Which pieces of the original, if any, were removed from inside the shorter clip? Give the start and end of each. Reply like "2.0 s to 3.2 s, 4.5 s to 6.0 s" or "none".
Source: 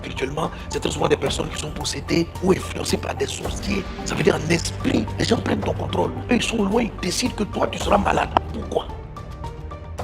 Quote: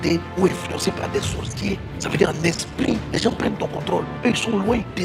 none